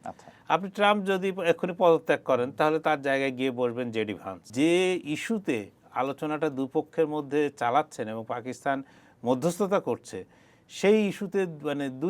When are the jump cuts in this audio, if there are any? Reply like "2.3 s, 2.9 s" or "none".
4.5 s